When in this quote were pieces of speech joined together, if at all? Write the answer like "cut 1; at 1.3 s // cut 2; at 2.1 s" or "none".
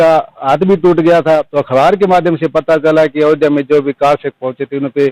cut 1; at 1.5 s

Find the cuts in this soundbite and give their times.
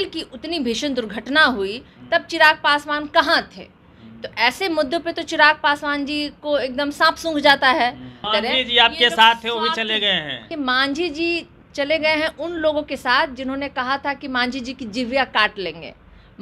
cut 1; at 8.2 s // cut 2; at 10.5 s

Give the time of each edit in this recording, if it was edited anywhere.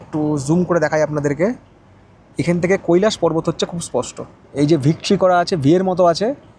none

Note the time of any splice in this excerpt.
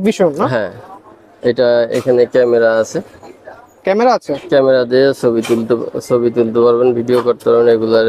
none

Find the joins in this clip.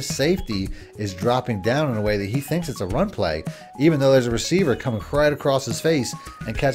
none

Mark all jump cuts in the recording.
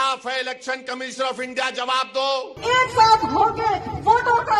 cut 1; at 2.5 s

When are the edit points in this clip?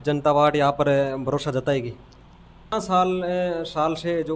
cut 1; at 2.7 s

